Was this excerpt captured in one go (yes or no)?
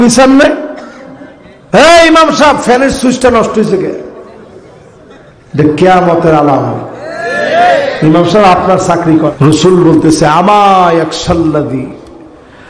no